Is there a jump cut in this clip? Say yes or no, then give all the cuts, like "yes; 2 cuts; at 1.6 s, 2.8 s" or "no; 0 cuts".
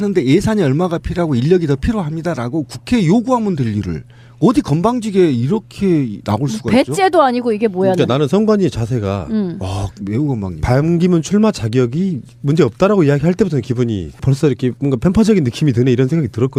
no; 0 cuts